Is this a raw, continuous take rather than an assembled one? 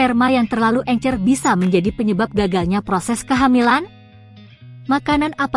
no; 1 cut; at 4.2 s

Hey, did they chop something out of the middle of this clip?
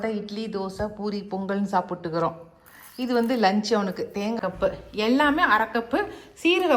yes; 1 cut; at 4.4 s

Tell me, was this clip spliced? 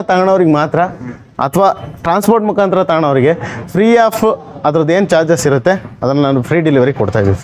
no; 0 cuts

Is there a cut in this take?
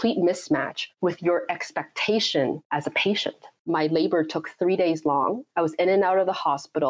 yes; 1 cut; at 3.5 s

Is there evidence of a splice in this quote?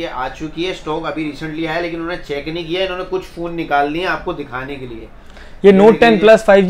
no; 0 cuts

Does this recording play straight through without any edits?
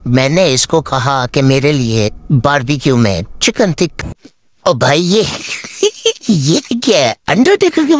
no; 1 cut; at 3.9 s

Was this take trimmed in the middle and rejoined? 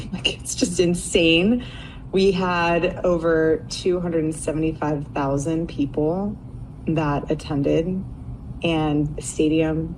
no; 0 cuts

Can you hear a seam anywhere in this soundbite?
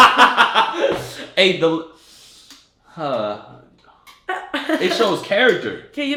no; 0 cuts

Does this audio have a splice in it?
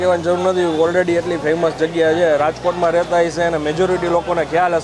no; 0 cuts

